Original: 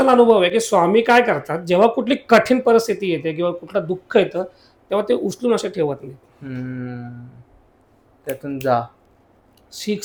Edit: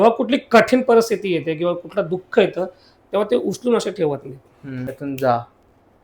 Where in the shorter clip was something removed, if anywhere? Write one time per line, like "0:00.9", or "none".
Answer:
0:04.9